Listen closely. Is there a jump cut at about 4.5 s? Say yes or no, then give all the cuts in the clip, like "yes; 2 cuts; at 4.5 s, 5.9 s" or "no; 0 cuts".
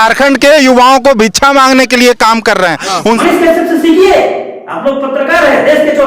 no; 1 cut; at 3.2 s